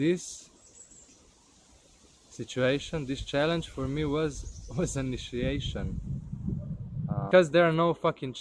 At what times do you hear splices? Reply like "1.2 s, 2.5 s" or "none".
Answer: 7.3 s